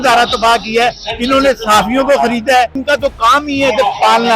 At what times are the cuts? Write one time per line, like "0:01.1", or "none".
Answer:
0:02.8